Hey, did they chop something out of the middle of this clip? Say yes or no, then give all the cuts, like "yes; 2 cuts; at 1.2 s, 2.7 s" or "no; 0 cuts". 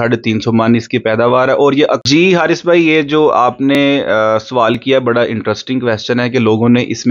yes; 1 cut; at 2.0 s